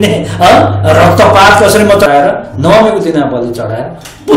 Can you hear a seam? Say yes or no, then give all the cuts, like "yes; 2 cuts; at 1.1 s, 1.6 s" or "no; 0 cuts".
yes; 1 cut; at 2.1 s